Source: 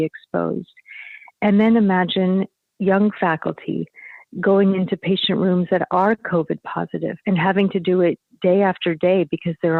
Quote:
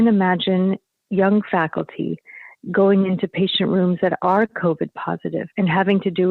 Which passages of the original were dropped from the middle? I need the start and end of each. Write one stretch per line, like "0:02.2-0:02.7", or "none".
none